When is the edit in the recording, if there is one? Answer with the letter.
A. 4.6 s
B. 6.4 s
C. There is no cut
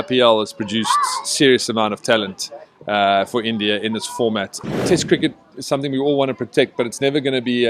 A